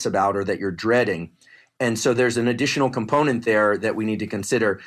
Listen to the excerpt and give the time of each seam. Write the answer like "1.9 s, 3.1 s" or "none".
none

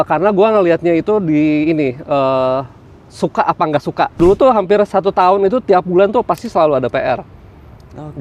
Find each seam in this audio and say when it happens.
4.1 s

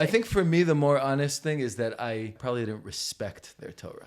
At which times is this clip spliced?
2.3 s

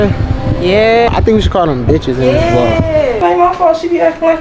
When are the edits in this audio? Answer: 1.1 s, 3.2 s

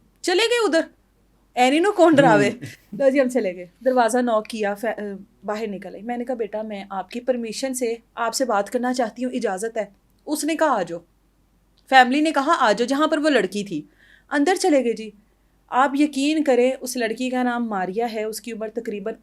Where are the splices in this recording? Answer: none

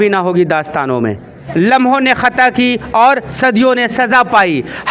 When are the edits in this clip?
1.4 s

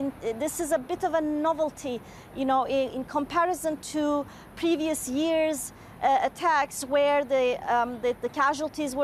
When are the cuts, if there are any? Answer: none

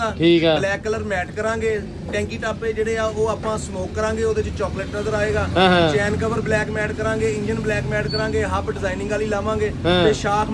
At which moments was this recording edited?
none

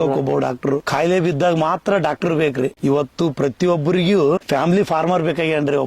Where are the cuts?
0.9 s, 2.7 s, 4.4 s

